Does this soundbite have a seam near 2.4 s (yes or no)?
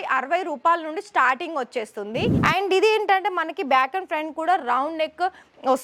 yes